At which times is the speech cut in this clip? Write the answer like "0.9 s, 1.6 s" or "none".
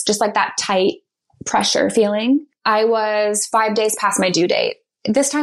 2.4 s

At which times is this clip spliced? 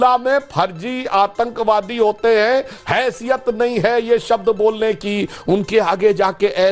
none

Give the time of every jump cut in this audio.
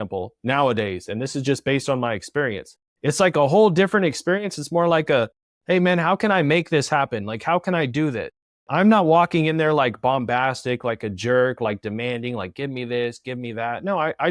none

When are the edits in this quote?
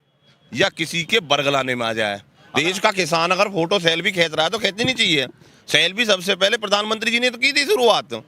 2.3 s

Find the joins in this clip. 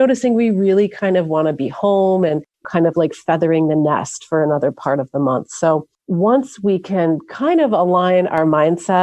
2.7 s, 6.0 s

